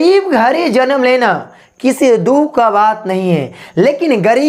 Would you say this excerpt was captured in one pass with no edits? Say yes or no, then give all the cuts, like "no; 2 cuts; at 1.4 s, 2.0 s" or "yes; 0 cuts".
yes; 0 cuts